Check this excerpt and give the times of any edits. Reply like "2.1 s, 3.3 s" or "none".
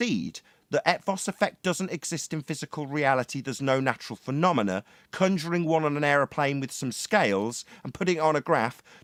none